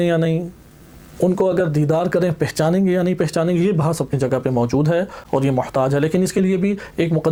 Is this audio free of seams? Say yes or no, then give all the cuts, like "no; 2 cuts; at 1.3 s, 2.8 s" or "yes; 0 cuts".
yes; 0 cuts